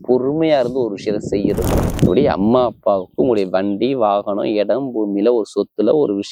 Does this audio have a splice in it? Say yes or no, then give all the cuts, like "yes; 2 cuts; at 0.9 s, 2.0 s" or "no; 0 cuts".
yes; 1 cut; at 1.8 s